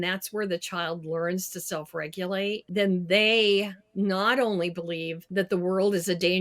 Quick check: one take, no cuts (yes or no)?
no